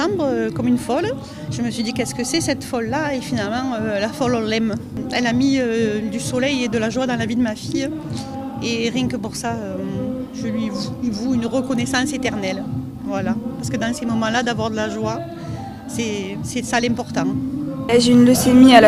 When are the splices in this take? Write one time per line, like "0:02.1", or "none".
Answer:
none